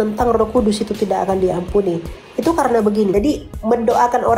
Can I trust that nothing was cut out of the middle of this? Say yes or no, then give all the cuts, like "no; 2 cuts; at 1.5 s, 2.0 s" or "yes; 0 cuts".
no; 1 cut; at 3.1 s